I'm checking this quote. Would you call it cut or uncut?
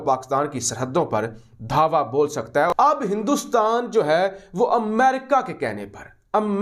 uncut